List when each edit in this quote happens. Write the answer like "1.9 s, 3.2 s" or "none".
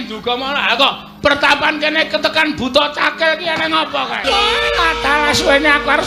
4.2 s